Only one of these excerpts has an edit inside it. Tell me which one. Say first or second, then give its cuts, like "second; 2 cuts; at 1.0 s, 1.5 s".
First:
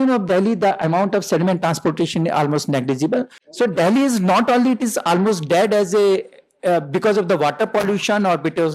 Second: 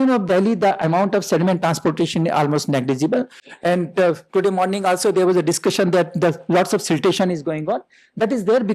first; 1 cut; at 3.4 s